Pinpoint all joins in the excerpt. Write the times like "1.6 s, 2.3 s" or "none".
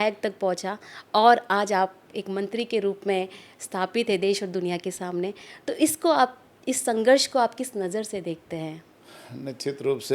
none